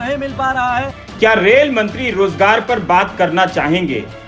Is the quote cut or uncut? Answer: cut